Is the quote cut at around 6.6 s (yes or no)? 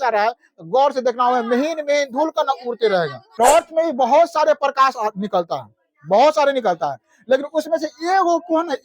no